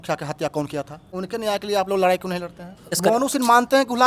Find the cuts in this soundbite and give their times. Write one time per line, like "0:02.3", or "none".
0:01.1
0:03.0